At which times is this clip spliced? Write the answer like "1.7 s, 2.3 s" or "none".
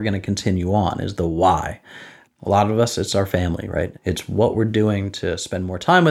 3.9 s